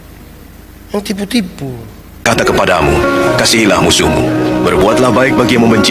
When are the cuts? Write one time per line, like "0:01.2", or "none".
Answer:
0:02.3